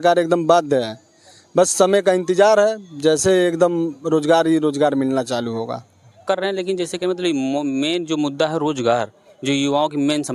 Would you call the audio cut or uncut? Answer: cut